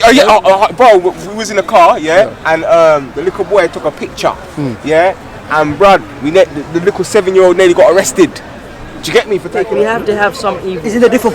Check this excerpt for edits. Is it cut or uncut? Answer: cut